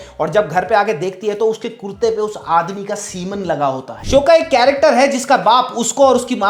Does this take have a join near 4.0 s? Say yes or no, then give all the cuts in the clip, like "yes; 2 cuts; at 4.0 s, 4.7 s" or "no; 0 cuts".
yes; 1 cut; at 4.0 s